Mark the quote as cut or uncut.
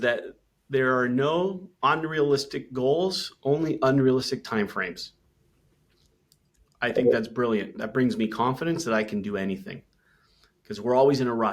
uncut